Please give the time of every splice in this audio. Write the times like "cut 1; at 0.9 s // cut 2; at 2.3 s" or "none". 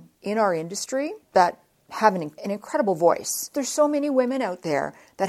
cut 1; at 1.2 s // cut 2; at 2.3 s // cut 3; at 3.5 s